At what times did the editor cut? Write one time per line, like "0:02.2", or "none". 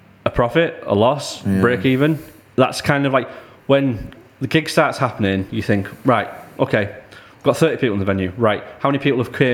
none